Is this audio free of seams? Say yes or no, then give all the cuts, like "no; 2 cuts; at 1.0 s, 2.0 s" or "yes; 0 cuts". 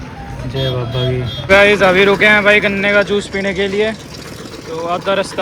no; 1 cut; at 1.3 s